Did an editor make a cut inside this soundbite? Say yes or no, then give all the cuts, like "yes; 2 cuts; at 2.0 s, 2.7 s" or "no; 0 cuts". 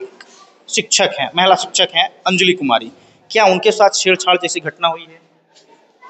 no; 0 cuts